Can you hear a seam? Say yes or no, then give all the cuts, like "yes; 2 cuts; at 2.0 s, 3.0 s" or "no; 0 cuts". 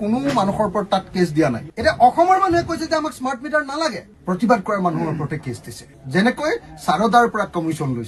yes; 2 cuts; at 1.7 s, 5.9 s